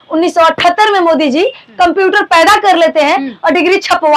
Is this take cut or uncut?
uncut